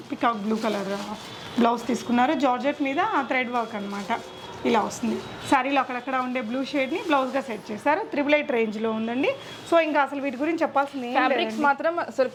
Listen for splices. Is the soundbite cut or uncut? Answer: uncut